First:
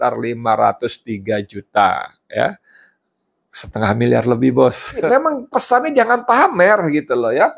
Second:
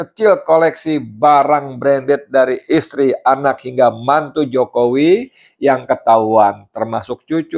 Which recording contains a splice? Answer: first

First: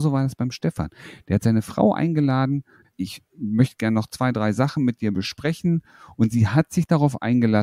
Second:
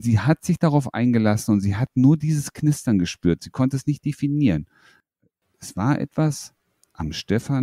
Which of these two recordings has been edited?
first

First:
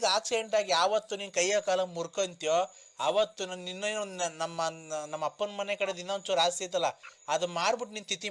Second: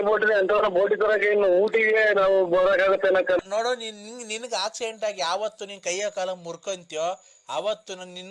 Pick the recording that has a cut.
second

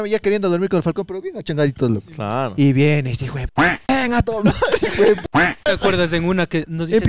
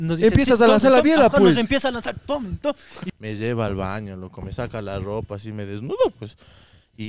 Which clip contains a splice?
second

